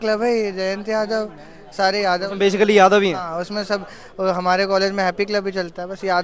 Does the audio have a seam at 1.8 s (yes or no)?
no